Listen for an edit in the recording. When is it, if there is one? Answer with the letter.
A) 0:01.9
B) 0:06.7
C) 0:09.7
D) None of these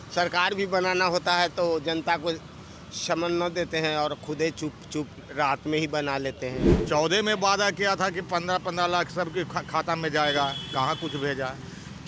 B